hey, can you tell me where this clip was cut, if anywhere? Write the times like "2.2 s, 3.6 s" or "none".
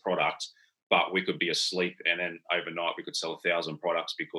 none